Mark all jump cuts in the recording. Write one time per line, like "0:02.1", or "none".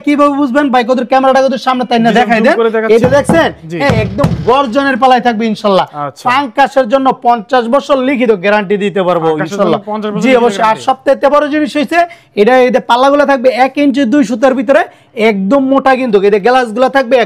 none